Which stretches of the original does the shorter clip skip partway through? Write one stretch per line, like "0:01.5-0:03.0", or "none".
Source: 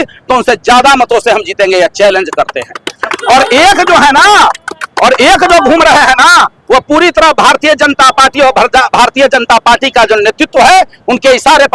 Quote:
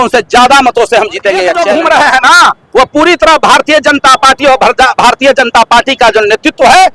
0:02.0-0:05.6